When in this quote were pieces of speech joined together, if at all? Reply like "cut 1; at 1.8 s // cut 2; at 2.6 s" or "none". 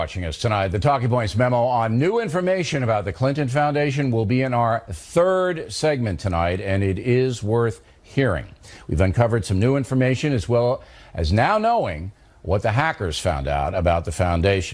none